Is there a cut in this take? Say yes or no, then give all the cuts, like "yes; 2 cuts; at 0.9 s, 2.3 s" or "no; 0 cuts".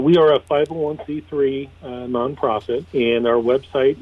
yes; 1 cut; at 2.9 s